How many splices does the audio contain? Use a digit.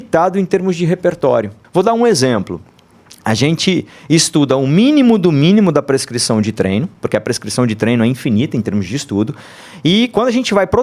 2